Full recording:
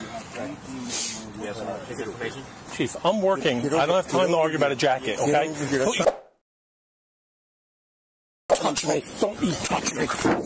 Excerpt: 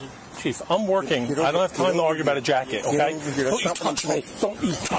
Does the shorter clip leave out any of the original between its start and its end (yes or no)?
yes